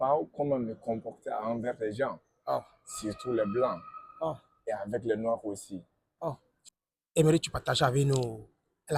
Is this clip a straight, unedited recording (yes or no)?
no